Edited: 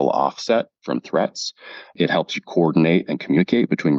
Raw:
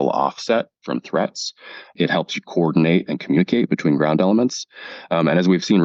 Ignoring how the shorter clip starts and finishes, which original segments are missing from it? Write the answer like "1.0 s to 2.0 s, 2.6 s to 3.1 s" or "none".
none